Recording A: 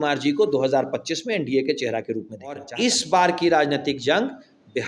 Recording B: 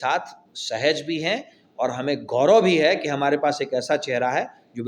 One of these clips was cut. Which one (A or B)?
A